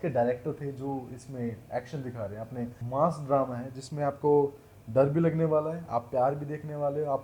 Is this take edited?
yes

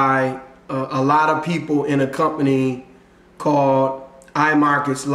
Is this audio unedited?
yes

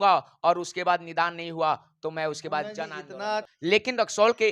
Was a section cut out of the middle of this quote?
yes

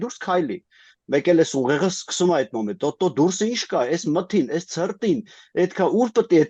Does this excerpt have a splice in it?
no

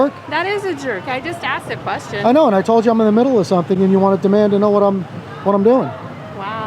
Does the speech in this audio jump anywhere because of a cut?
no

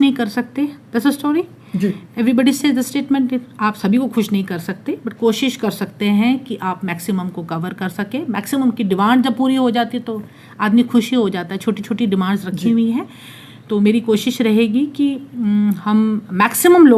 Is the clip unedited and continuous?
yes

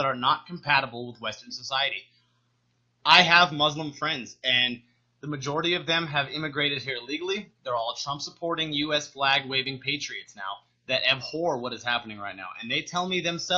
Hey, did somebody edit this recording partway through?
no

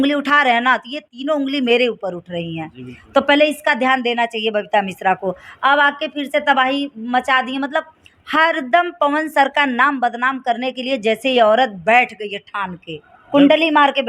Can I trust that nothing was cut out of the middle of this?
yes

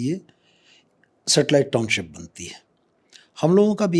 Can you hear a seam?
no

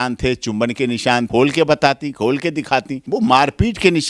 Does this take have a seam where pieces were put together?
yes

